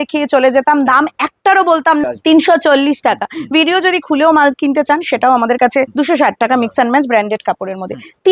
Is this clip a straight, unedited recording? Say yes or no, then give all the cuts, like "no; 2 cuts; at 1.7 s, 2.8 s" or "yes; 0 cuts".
no; 2 cuts; at 2.0 s, 5.9 s